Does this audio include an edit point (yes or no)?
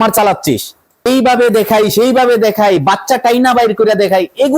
yes